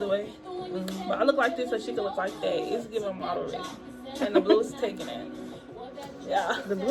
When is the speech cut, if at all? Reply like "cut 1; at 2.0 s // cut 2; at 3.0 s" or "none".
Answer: none